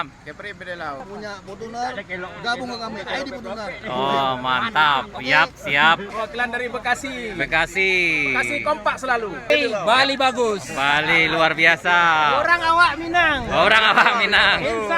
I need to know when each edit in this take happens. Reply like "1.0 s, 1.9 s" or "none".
1.0 s, 6.1 s, 9.5 s